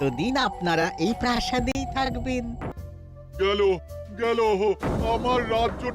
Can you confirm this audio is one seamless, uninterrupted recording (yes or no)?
no